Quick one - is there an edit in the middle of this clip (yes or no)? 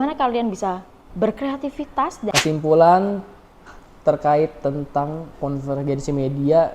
yes